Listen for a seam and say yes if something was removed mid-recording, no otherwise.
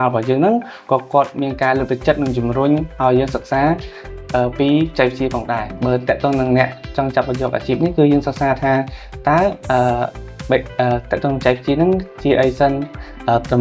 yes